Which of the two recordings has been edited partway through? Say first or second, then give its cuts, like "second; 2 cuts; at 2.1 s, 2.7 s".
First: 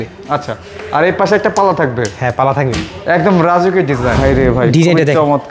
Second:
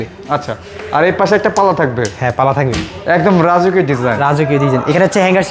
first; 1 cut; at 4.1 s